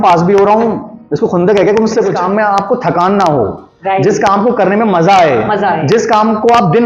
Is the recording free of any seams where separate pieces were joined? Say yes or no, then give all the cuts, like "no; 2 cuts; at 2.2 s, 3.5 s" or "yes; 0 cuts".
no; 1 cut; at 2.1 s